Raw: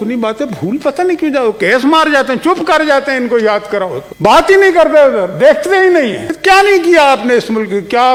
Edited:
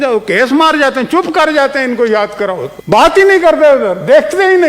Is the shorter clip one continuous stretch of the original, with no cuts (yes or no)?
yes